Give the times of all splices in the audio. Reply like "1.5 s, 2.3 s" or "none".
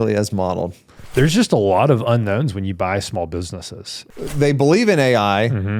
0.9 s, 4.0 s

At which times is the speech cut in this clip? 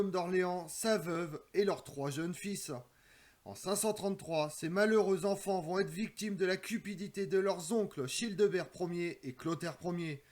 2.3 s

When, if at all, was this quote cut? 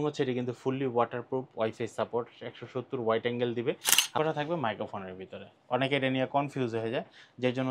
4.2 s

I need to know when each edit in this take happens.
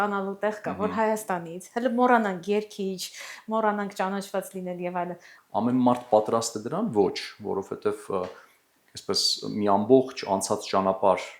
5.3 s

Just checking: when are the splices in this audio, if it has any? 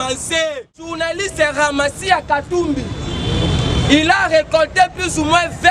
1.0 s

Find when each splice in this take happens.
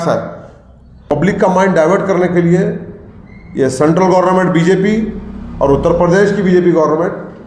1.1 s

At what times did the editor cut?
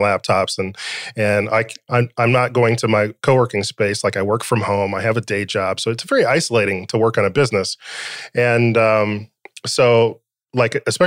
none

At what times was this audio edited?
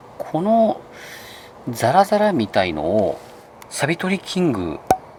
none

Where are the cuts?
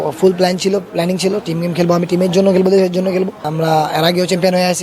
3.5 s

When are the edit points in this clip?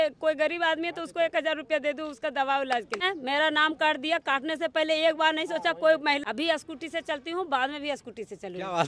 3.1 s, 6.2 s

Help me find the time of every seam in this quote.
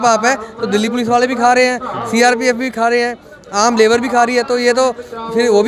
none

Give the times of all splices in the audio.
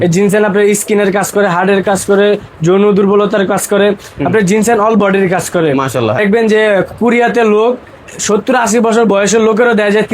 6.2 s

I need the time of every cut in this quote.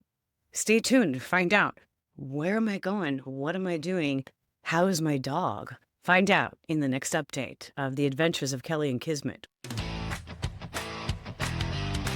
9.4 s

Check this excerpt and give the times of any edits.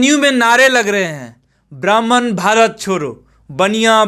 none

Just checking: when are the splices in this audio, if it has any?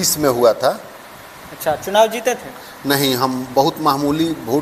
none

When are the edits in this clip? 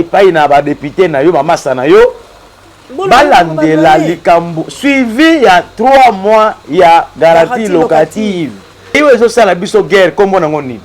9.0 s

